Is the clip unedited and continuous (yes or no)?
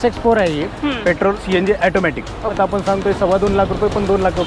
no